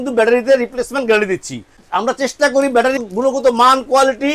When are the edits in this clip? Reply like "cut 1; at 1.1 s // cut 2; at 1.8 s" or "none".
cut 1; at 1.8 s // cut 2; at 3.0 s